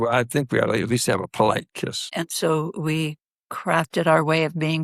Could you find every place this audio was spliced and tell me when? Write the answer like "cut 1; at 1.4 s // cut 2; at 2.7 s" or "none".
cut 1; at 2.1 s